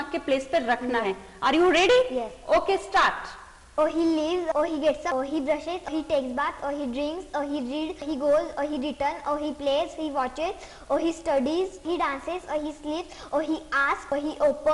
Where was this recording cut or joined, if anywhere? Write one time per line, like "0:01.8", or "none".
none